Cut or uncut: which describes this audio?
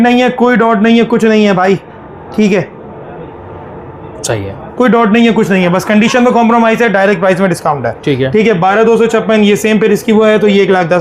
uncut